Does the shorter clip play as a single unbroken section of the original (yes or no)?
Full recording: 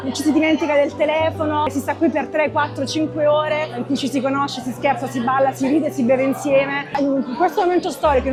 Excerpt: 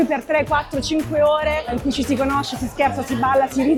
yes